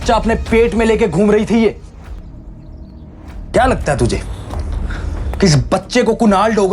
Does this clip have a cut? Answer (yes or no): yes